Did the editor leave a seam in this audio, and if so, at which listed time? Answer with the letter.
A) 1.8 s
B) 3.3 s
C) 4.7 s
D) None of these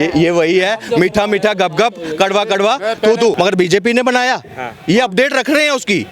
B